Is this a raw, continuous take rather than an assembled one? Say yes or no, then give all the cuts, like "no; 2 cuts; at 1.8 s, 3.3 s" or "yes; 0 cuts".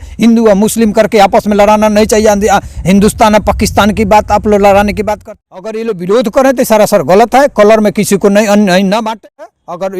no; 2 cuts; at 5.2 s, 9.1 s